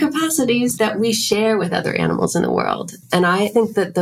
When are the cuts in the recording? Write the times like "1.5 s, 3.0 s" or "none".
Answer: none